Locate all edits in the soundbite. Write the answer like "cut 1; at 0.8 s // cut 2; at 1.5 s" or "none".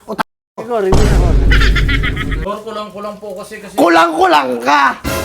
cut 1; at 2.4 s